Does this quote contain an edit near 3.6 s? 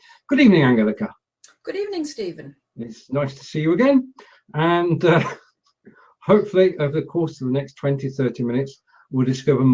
yes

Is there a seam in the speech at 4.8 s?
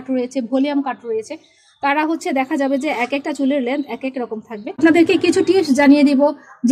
yes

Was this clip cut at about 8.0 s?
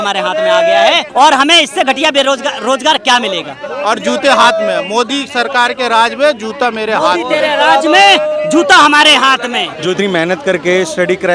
no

